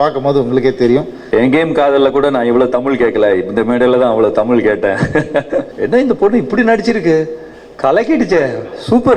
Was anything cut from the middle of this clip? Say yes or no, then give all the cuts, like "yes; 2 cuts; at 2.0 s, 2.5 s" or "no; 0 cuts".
yes; 2 cuts; at 1.2 s, 5.7 s